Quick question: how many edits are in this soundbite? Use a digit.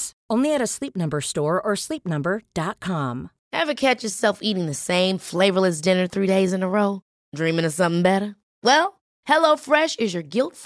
1